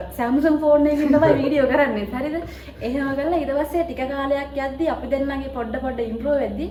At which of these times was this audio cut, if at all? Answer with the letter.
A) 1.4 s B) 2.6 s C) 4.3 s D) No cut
D